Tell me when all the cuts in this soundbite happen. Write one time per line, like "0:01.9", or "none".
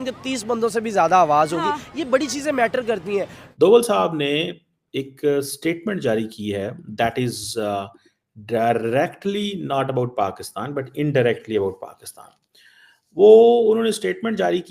0:03.4